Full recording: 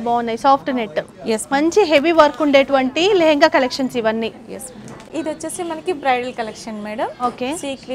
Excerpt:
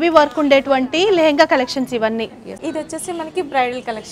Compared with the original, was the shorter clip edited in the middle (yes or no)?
yes